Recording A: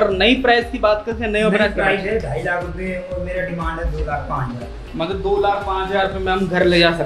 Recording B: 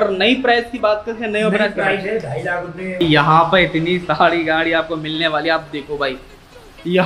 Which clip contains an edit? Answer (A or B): B